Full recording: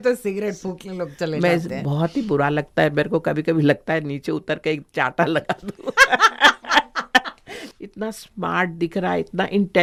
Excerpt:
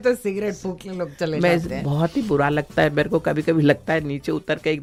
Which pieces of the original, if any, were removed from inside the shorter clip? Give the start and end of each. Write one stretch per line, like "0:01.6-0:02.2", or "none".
none